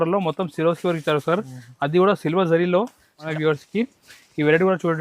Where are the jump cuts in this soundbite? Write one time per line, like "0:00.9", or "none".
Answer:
0:03.2